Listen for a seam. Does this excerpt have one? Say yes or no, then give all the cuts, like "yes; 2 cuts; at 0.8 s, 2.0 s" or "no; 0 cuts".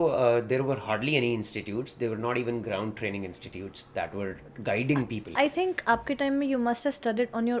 no; 0 cuts